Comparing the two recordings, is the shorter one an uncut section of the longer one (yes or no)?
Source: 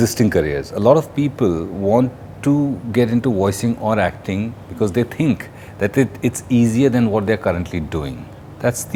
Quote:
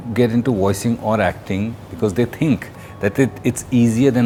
yes